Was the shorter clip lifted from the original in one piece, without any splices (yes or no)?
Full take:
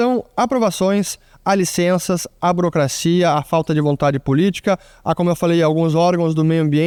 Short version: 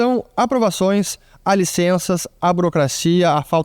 yes